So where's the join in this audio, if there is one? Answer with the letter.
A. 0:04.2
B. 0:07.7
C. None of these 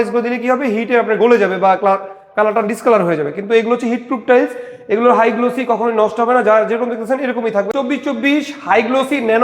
B